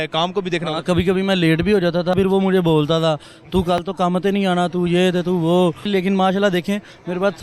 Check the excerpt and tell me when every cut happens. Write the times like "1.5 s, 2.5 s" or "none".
2.1 s, 5.9 s